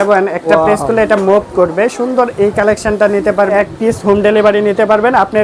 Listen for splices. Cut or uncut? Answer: cut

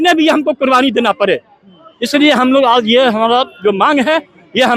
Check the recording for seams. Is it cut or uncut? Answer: uncut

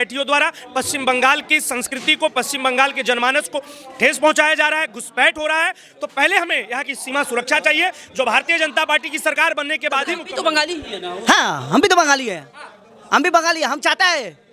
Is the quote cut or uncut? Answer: cut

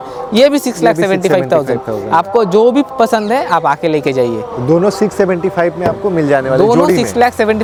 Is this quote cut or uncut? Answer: uncut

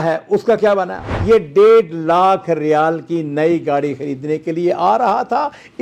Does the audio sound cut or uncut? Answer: cut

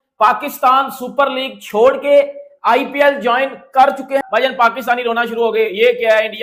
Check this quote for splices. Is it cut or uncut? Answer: uncut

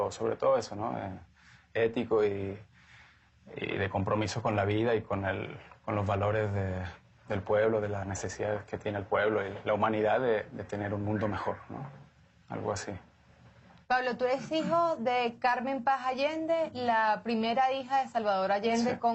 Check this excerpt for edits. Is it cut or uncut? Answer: uncut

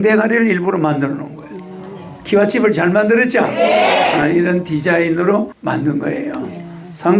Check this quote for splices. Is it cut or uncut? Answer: cut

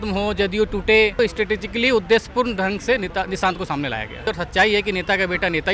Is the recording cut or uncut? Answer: cut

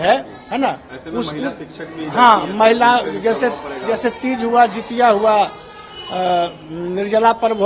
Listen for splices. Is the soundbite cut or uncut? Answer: uncut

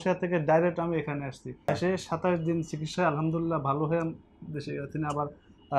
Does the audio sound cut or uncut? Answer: cut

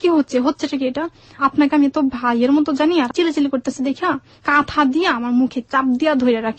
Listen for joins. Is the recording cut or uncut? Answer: cut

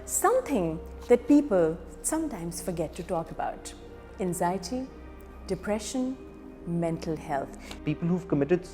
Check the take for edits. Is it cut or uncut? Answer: cut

